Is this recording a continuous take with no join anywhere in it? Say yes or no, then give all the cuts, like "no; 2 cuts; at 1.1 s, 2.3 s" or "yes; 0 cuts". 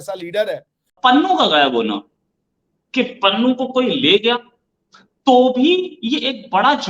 no; 1 cut; at 0.9 s